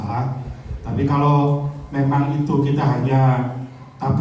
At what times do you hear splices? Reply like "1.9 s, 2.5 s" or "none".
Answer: none